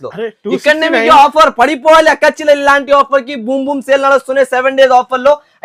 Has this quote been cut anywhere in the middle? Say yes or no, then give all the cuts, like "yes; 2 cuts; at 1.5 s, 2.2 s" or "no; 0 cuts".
no; 0 cuts